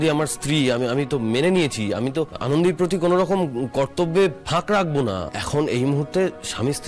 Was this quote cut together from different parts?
yes; 2 cuts; at 2.4 s, 5.3 s

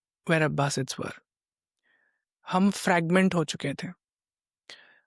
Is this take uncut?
yes; 0 cuts

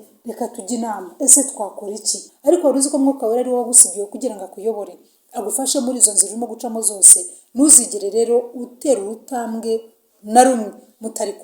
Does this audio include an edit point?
yes; 1 cut; at 2.2 s

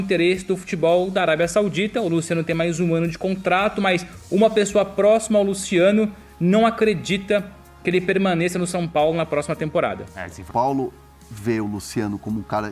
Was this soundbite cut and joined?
yes; 1 cut; at 10.5 s

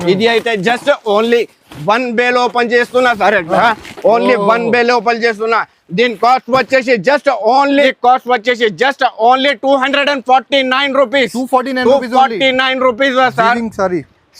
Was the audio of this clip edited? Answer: yes; 1 cut; at 7.9 s

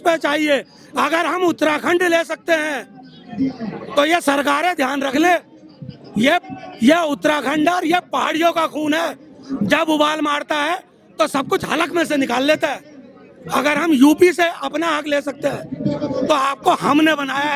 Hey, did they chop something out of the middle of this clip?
no; 0 cuts

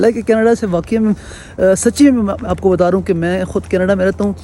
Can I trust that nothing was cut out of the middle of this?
yes; 0 cuts

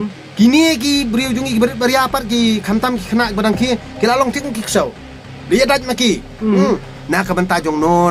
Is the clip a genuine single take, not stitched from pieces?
no; 1 cut; at 6.9 s

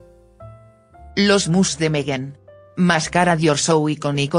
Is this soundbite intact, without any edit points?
no; 1 cut; at 1.6 s

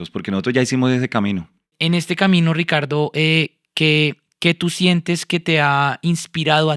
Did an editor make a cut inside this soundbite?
yes; 1 cut; at 1.7 s

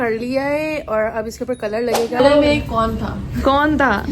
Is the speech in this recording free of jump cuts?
no; 1 cut; at 2.2 s

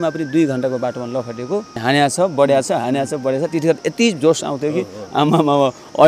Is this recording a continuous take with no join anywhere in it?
no; 1 cut; at 1.8 s

